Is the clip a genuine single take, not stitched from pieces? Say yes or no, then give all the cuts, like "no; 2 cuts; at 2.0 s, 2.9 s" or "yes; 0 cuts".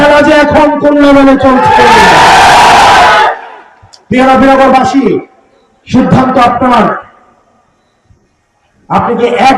yes; 0 cuts